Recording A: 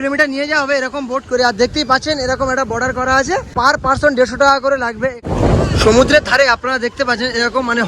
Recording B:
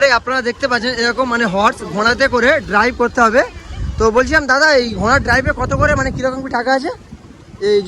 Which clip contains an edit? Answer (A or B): A